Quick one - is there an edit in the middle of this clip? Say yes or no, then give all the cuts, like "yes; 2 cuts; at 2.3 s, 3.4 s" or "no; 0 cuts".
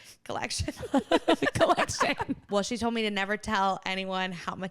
yes; 1 cut; at 2.4 s